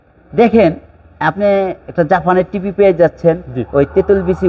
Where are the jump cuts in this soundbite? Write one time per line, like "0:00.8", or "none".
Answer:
none